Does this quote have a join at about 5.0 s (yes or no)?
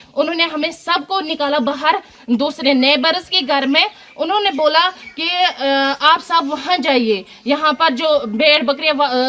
no